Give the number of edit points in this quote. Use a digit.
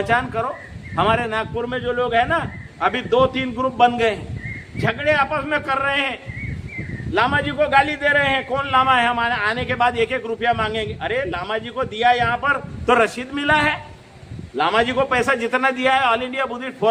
0